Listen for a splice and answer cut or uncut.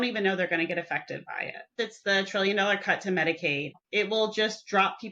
cut